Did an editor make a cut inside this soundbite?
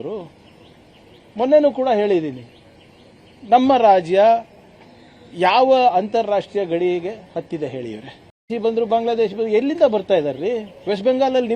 yes; 1 cut; at 8.4 s

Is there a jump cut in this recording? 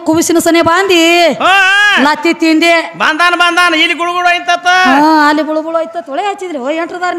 no; 0 cuts

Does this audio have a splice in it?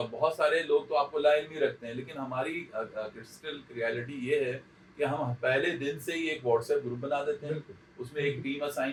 no; 0 cuts

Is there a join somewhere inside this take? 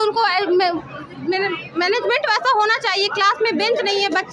no; 0 cuts

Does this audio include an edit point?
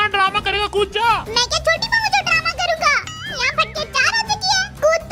no; 0 cuts

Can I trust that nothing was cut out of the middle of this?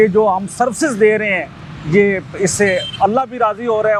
yes; 0 cuts

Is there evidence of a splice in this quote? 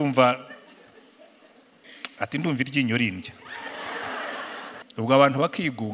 yes; 1 cut; at 4.8 s

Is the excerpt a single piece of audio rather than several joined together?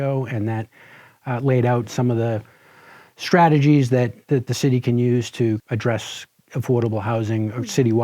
no; 1 cut; at 5.6 s

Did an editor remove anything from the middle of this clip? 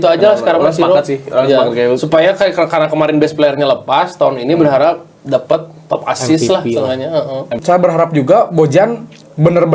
yes; 1 cut; at 7.6 s

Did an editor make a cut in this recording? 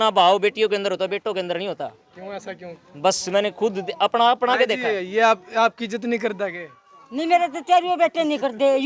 no; 0 cuts

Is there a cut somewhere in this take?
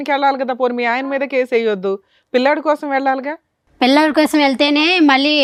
no; 0 cuts

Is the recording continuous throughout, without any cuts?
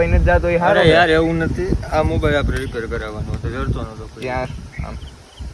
yes; 0 cuts

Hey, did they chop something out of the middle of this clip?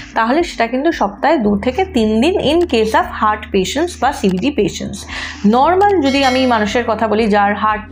no; 0 cuts

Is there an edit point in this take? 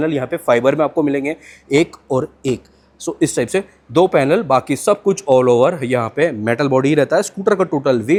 no; 0 cuts

